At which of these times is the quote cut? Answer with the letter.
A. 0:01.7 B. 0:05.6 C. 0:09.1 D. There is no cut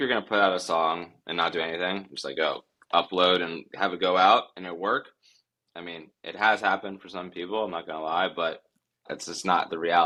D